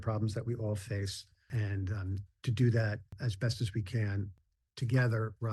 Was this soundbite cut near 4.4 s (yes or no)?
yes